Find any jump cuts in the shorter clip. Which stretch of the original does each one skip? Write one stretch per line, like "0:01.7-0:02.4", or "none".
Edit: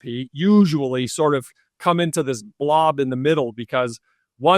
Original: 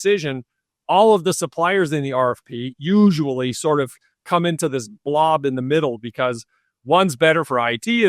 none